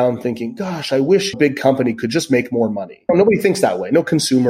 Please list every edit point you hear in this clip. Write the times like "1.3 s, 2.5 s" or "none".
1.3 s, 3.1 s